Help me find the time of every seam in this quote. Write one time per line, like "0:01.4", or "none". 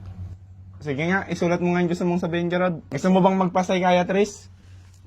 0:02.9